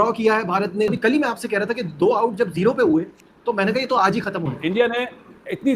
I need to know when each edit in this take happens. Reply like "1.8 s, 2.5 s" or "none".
0.9 s, 4.5 s